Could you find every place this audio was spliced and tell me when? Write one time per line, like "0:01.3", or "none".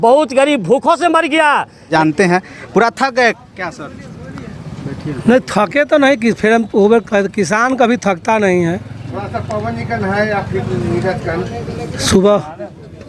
0:01.8